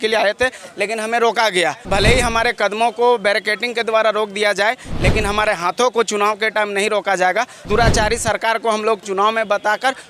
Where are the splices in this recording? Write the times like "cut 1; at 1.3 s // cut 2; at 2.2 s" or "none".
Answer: cut 1; at 1.9 s // cut 2; at 7.6 s